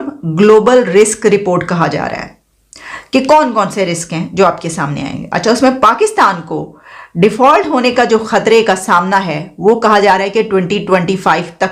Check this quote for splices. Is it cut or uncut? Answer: uncut